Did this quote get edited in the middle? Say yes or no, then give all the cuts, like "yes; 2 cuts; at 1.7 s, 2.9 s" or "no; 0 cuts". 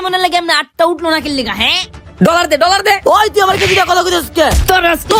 no; 0 cuts